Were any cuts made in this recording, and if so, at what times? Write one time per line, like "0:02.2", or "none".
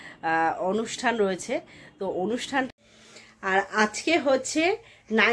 0:02.7